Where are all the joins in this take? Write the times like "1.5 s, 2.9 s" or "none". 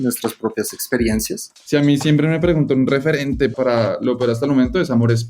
1.5 s, 3.5 s